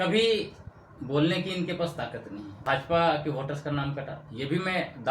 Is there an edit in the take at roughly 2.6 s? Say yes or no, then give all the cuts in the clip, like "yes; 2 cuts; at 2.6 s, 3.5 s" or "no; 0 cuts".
yes; 1 cut; at 2.6 s